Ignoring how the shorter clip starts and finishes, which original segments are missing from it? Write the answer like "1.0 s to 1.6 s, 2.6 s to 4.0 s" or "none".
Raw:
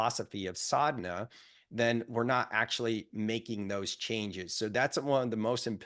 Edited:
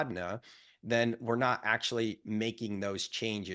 none